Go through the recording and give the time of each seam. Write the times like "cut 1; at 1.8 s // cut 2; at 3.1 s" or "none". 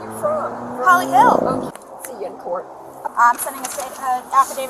cut 1; at 1.7 s // cut 2; at 3.1 s